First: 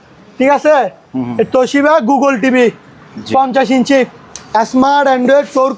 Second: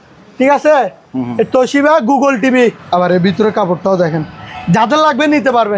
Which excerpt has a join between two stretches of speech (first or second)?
second